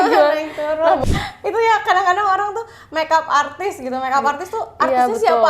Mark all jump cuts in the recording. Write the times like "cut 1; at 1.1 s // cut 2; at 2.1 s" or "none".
cut 1; at 1.0 s